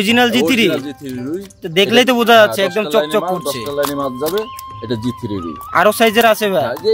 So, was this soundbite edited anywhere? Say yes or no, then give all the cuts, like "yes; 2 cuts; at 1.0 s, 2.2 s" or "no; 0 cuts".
no; 0 cuts